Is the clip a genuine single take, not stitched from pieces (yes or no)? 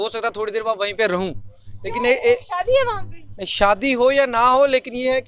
yes